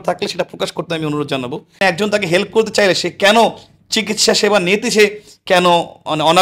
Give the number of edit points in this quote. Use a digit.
1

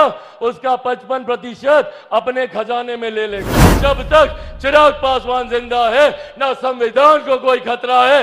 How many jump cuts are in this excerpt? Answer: 1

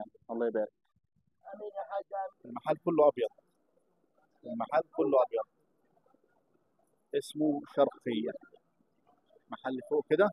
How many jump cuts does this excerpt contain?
1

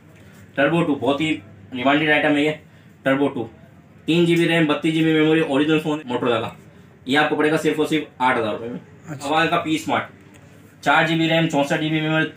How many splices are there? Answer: 2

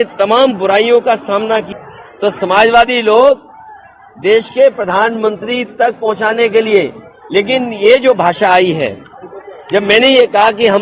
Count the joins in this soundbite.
1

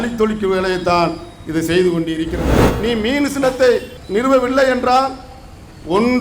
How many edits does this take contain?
1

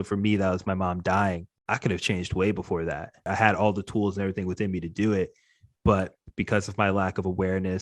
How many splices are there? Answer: 2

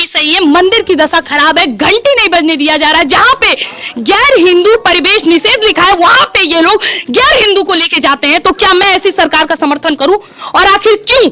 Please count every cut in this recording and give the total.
0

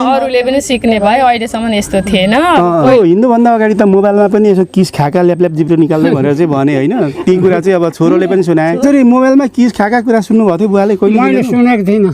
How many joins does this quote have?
2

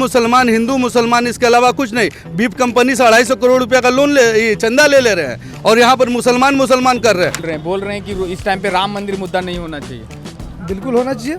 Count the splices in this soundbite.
1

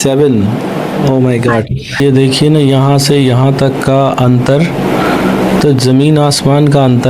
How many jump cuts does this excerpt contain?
1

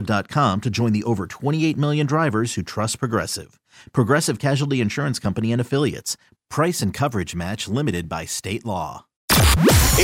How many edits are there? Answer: 1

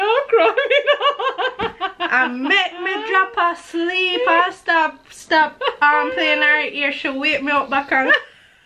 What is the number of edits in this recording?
0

